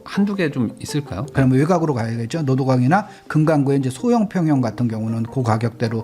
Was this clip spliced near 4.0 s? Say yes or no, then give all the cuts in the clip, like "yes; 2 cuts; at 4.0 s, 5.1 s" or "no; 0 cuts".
no; 1 cut; at 1.3 s